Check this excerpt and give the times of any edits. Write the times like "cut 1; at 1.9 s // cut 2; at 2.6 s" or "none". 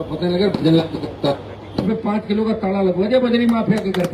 cut 1; at 1.9 s